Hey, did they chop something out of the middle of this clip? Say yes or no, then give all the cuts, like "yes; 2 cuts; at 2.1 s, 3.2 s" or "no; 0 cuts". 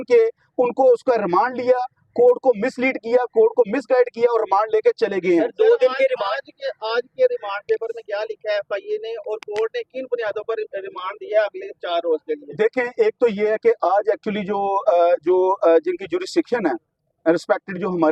no; 0 cuts